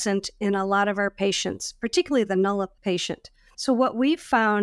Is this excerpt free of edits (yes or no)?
no